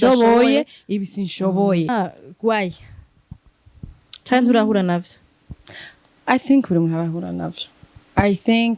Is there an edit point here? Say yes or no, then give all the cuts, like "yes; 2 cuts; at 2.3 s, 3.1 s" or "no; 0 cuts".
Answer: yes; 1 cut; at 1.9 s